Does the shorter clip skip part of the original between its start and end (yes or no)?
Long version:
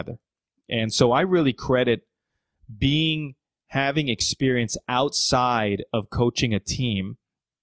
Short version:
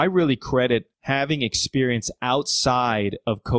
yes